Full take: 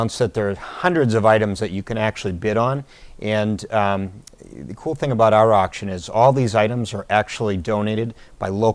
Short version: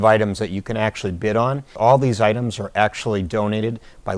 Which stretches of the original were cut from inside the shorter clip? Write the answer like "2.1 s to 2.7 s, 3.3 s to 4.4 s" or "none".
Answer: 2.9 s to 6.0 s